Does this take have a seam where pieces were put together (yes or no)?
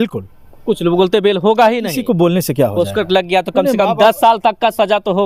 no